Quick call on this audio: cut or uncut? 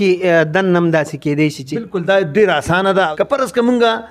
cut